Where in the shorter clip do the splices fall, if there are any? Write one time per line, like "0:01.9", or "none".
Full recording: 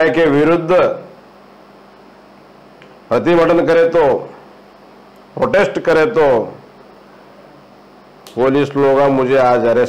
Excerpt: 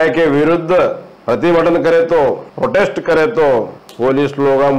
0:01.1
0:02.5
0:03.8